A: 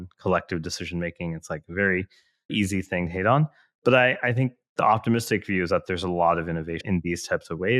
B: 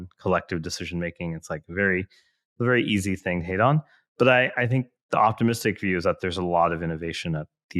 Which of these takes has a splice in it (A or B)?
A